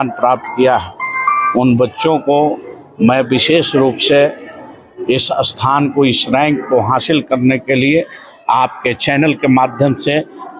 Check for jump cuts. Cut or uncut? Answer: uncut